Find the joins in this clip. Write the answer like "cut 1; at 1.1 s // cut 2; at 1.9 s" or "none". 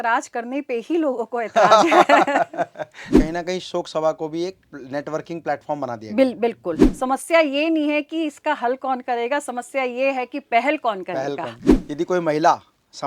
cut 1; at 3.2 s // cut 2; at 6.9 s // cut 3; at 11.9 s

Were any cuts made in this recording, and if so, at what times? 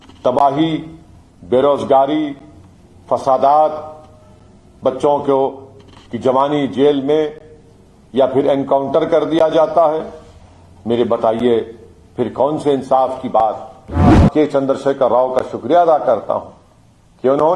cut 1; at 14.2 s

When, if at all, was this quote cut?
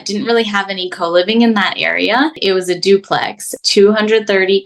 cut 1; at 2.4 s // cut 2; at 3.5 s

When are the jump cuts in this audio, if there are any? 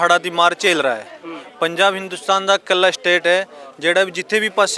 none

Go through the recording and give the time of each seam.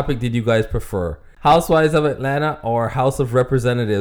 cut 1; at 1.3 s

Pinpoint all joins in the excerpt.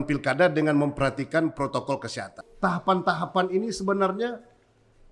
cut 1; at 2.5 s

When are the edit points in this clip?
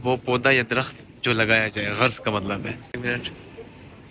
cut 1; at 2.9 s

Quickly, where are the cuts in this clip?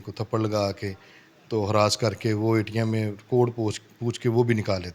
none

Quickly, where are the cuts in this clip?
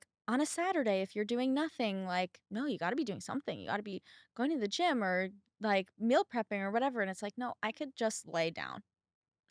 none

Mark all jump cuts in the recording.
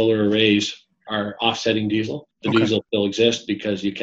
cut 1; at 1.0 s // cut 2; at 2.2 s // cut 3; at 2.9 s

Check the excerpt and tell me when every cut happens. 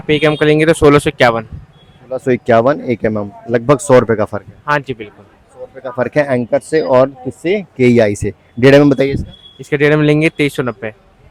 none

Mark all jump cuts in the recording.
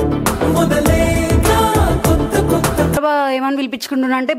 cut 1; at 3.0 s

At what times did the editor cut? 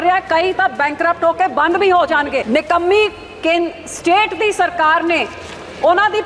cut 1; at 2.4 s

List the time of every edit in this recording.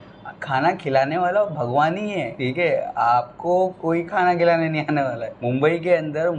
cut 1; at 2.3 s // cut 2; at 5.3 s

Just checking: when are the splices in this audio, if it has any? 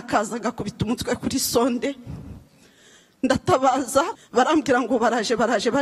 cut 1; at 4.1 s

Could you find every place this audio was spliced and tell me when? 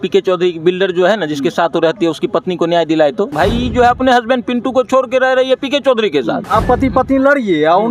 cut 1; at 3.3 s // cut 2; at 6.4 s

